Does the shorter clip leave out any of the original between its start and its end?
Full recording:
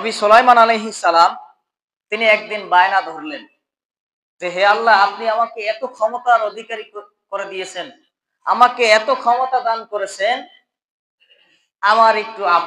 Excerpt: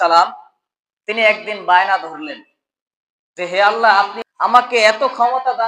yes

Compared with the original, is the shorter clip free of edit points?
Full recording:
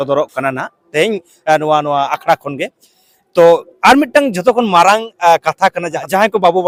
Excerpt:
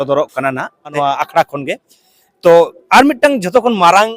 no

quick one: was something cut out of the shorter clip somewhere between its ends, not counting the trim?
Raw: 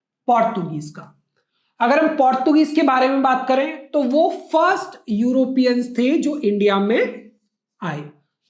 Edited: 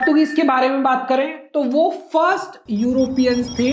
no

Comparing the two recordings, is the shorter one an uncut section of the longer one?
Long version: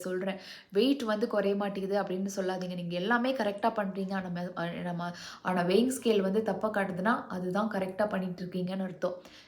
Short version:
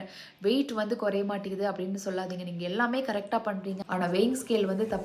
no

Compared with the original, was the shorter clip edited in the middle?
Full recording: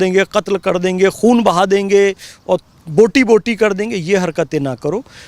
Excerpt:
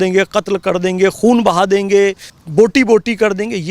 yes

